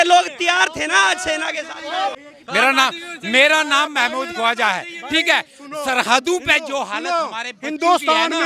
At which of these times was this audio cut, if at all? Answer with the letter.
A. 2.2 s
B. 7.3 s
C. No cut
A